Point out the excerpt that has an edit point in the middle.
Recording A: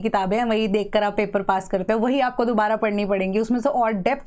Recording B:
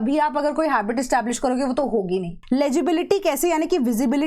B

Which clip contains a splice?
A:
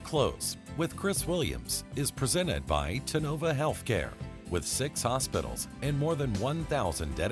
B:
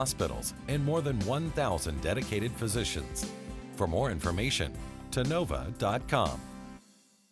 B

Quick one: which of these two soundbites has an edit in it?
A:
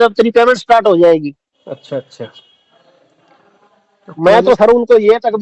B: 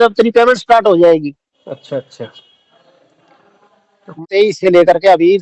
B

